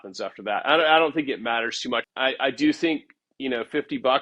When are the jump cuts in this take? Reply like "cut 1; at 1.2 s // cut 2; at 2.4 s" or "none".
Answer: cut 1; at 2.1 s